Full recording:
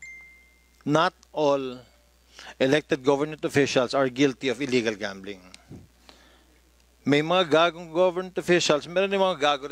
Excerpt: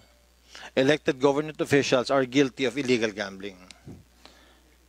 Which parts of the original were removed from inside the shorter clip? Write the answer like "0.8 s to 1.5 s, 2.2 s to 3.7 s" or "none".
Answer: none